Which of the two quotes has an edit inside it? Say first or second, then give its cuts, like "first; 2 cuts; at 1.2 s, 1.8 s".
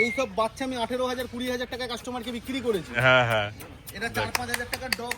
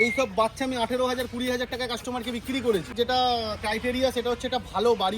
second; 1 cut; at 2.9 s